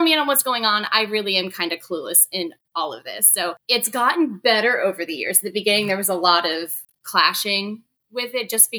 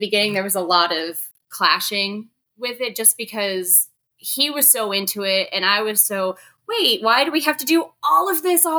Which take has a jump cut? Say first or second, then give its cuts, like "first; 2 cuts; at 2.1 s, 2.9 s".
first; 1 cut; at 3.6 s